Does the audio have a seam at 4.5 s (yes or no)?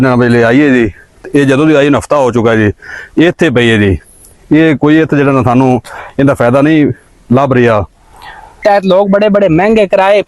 no